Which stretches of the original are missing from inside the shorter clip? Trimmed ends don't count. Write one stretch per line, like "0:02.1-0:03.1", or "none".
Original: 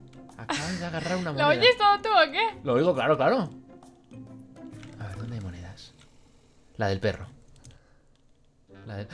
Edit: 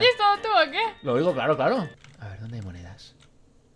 0:03.7-0:04.8